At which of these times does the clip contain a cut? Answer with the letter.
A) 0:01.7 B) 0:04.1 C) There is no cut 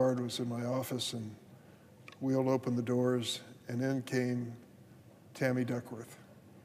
B